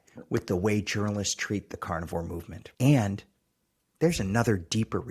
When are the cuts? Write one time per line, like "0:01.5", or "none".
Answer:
0:02.6